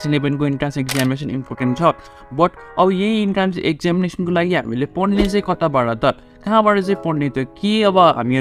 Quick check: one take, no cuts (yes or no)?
yes